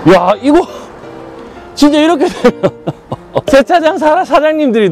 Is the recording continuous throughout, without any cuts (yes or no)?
yes